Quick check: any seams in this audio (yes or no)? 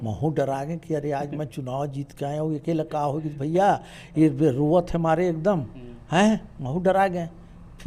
no